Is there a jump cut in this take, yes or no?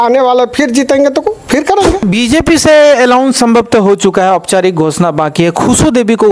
yes